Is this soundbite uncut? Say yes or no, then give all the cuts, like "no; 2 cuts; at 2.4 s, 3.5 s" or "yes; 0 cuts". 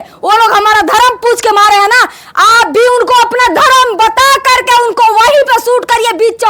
yes; 0 cuts